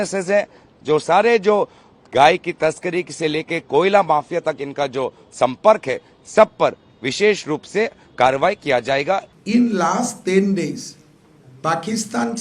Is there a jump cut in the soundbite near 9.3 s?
yes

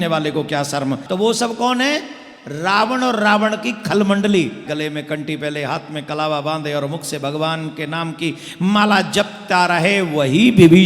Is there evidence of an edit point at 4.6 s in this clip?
yes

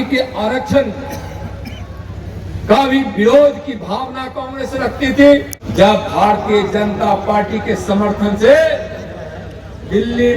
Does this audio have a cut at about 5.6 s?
yes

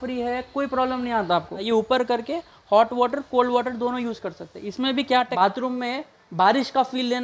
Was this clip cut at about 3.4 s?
no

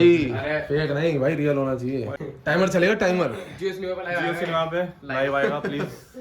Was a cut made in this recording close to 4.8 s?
no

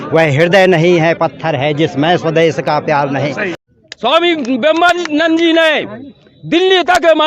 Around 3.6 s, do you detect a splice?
yes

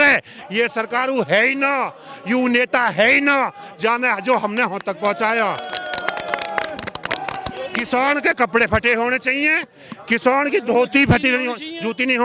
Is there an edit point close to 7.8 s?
yes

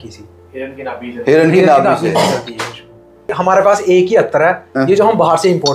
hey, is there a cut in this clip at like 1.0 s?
no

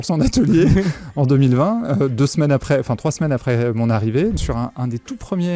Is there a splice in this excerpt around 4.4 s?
yes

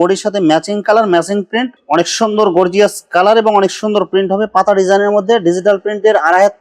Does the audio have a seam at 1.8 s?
yes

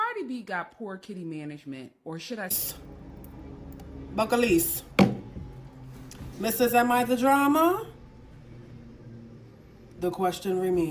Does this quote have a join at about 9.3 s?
no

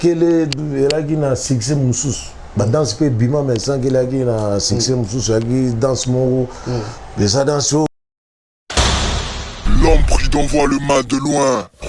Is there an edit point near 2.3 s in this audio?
no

